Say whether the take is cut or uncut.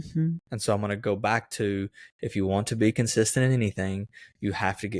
uncut